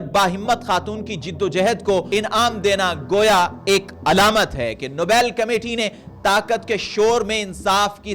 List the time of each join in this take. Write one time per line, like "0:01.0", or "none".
0:02.1